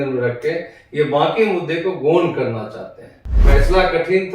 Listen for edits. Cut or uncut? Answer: cut